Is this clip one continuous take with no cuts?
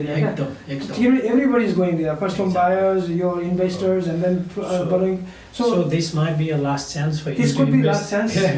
yes; 0 cuts

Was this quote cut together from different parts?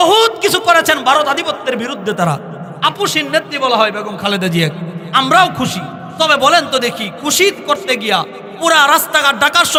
no; 0 cuts

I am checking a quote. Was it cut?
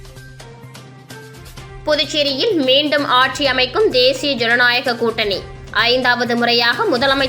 yes; 1 cut; at 1.3 s

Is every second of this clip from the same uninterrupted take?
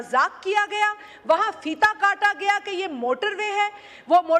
yes; 0 cuts

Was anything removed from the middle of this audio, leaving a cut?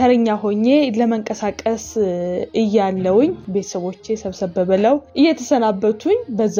yes; 3 cuts; at 2.5 s, 3.4 s, 5.1 s

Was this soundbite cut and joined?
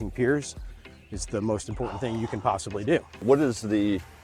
yes; 1 cut; at 3.2 s

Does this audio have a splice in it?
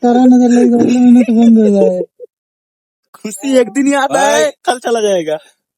yes; 1 cut; at 2.7 s

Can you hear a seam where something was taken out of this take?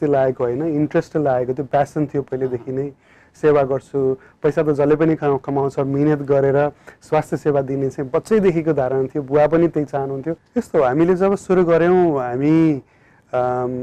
yes; 1 cut; at 10.4 s

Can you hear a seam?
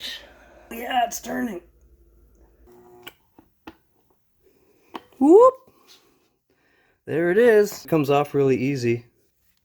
yes; 3 cuts; at 0.8 s, 2.7 s, 7.8 s

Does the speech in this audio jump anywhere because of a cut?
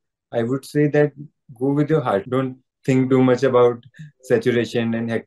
yes; 1 cut; at 2.3 s

